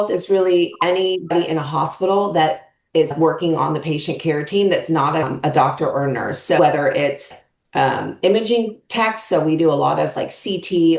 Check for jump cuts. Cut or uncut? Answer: cut